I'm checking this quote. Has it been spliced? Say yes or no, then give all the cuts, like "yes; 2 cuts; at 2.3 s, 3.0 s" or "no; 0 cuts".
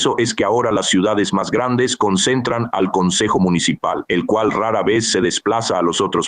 no; 0 cuts